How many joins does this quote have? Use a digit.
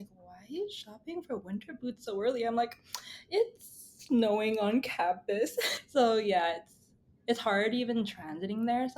1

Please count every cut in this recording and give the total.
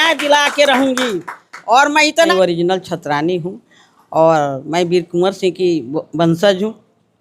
1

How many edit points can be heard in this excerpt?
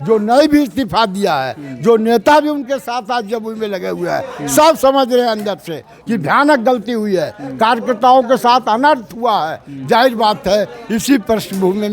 0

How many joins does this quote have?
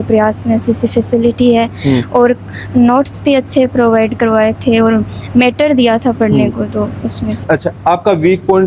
0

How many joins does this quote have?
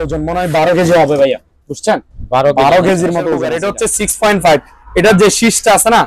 1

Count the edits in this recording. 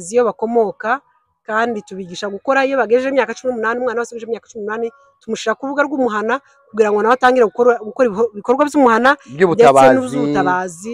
0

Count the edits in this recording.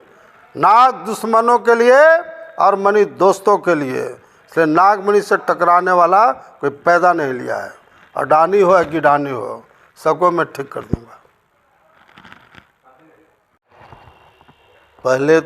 1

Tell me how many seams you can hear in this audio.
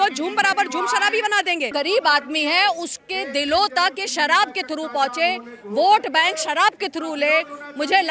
1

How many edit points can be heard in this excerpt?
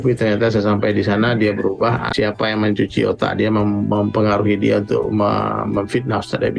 1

